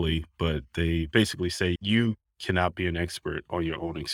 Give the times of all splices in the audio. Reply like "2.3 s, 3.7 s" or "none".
1.8 s